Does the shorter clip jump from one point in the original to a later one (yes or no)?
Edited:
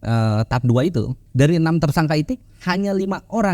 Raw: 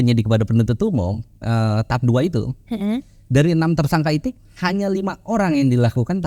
yes